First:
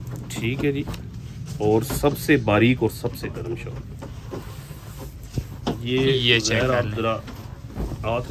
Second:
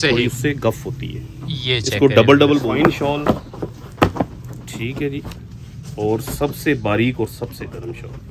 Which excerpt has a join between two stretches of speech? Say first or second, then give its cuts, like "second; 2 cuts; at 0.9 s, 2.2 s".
second; 1 cut; at 2.7 s